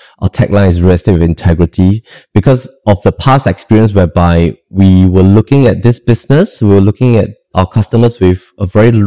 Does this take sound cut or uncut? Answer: cut